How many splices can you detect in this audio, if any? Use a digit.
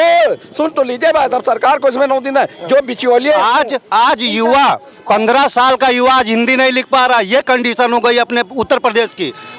1